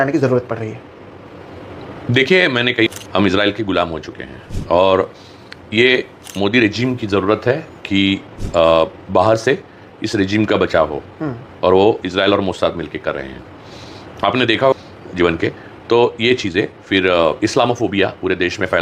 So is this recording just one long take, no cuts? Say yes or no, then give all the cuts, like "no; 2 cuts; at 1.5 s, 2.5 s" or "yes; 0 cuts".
yes; 0 cuts